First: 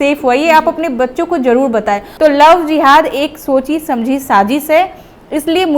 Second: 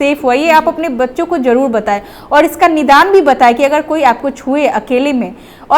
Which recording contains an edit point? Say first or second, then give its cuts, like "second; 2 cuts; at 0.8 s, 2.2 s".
first; 1 cut; at 2.1 s